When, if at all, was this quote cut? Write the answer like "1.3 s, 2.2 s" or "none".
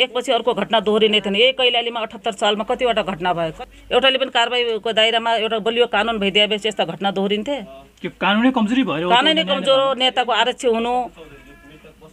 3.6 s